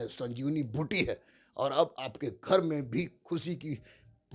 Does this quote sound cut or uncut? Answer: uncut